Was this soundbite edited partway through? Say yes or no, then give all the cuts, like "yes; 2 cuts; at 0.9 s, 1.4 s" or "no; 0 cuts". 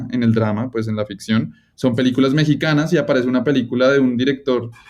no; 0 cuts